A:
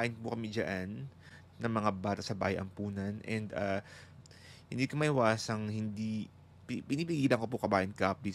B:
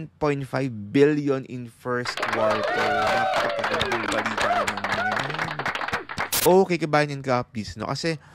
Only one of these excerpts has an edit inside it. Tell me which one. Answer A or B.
B